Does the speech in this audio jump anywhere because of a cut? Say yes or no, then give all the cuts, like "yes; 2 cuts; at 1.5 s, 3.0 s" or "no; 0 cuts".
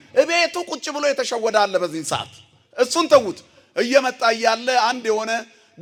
no; 0 cuts